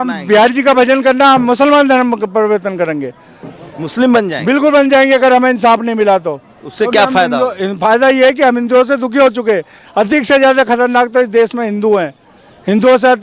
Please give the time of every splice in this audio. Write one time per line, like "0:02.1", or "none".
none